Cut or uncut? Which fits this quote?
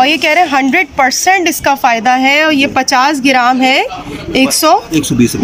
uncut